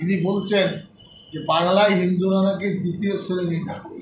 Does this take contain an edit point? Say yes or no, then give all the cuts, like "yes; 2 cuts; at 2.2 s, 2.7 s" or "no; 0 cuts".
no; 0 cuts